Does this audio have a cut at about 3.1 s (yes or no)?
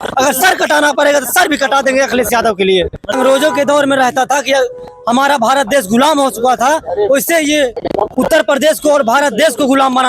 yes